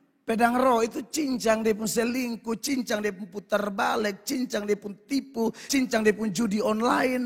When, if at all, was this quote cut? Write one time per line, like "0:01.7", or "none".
0:05.6